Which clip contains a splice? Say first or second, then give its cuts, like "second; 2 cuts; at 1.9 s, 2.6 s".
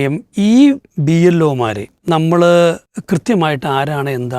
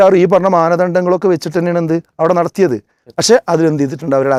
first; 2 cuts; at 1.9 s, 2.9 s